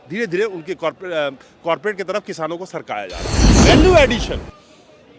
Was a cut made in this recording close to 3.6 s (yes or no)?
yes